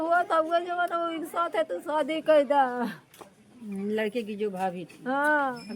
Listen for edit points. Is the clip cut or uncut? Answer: uncut